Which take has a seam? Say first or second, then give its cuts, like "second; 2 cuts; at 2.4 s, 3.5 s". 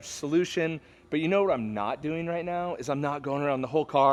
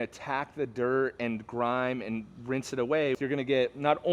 second; 1 cut; at 3.2 s